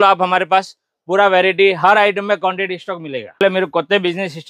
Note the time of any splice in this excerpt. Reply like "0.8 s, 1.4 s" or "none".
3.4 s